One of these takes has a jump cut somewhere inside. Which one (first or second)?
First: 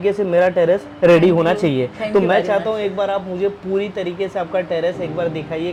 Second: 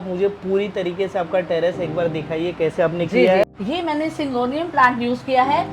second